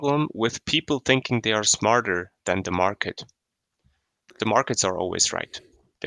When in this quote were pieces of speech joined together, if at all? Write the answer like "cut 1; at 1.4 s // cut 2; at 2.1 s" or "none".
cut 1; at 4.3 s